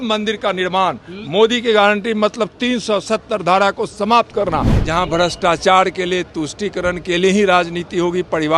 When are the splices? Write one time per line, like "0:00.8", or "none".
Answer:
0:04.8